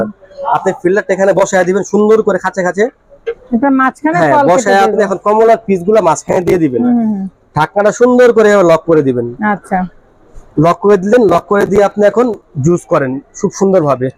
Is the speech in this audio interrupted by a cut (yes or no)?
no